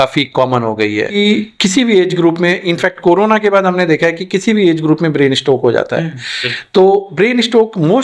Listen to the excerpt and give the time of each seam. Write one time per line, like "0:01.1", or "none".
0:01.2

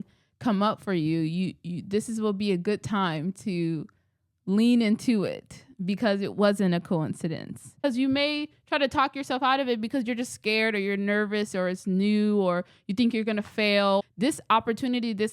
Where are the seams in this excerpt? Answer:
0:07.8
0:14.0

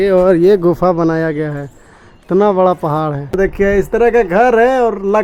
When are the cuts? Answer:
0:03.4

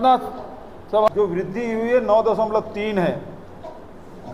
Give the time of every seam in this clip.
0:01.1

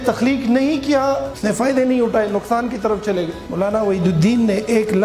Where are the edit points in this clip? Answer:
0:01.3
0:03.5

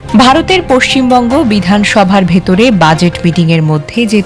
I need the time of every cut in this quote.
none

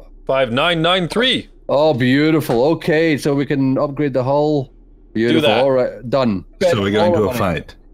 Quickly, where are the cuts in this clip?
0:01.5
0:06.5

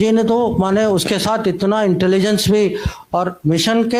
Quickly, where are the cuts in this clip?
none

